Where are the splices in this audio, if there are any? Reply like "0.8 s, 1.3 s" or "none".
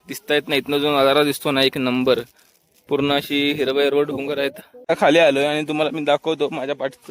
4.9 s